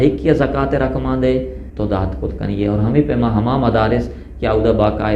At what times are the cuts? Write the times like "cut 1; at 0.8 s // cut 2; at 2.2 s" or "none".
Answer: cut 1; at 1.6 s

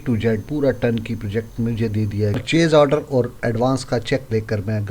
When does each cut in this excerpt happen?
cut 1; at 2.4 s

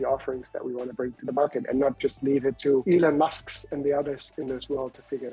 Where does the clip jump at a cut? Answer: cut 1; at 2.8 s

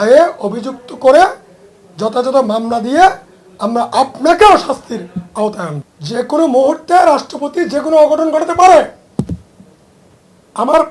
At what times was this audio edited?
cut 1; at 5.9 s

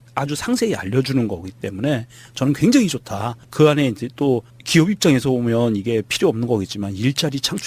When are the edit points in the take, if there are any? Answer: cut 1; at 6.4 s

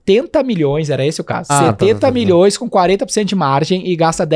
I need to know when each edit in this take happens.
cut 1; at 1.5 s

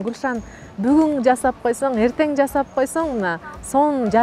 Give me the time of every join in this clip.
none

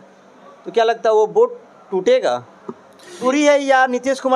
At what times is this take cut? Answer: cut 1; at 3.2 s

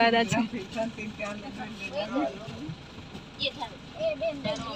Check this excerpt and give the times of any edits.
none

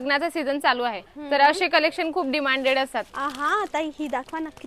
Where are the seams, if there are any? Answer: cut 1; at 1.1 s // cut 2; at 3.1 s

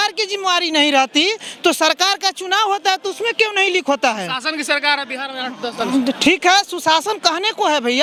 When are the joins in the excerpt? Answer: none

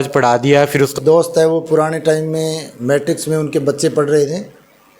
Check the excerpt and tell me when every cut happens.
cut 1; at 0.9 s

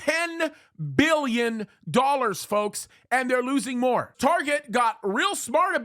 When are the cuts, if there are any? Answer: cut 1; at 4.1 s

